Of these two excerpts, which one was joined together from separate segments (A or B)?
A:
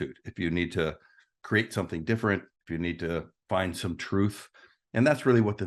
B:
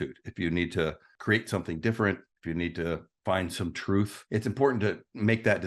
B